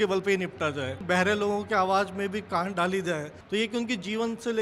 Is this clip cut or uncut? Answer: cut